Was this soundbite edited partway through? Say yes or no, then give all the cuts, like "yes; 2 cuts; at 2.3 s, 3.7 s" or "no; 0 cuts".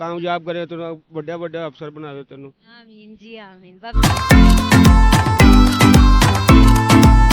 yes; 1 cut; at 3.9 s